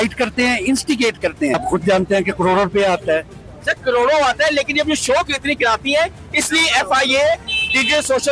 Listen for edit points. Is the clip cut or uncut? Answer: cut